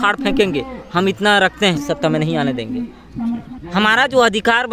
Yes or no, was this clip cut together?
yes